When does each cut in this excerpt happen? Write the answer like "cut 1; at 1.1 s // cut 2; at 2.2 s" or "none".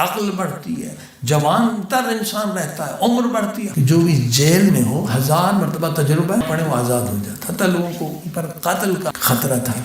cut 1; at 3.7 s // cut 2; at 6.4 s // cut 3; at 9.1 s